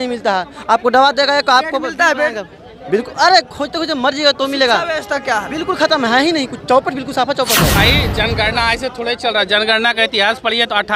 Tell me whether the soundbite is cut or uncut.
cut